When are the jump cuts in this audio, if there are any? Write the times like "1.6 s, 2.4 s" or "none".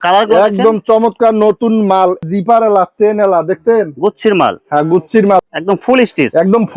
2.2 s, 5.4 s